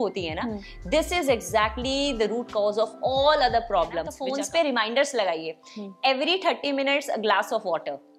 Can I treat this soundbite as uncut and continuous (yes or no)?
no